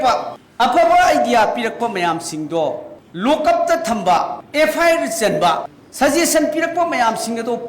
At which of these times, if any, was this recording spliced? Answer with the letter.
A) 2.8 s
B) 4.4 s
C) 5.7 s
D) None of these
B